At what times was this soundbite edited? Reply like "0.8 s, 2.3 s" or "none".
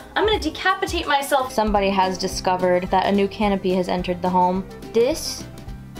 1.5 s